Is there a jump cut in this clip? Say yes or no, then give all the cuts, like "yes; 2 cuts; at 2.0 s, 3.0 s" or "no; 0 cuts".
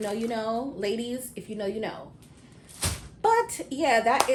no; 0 cuts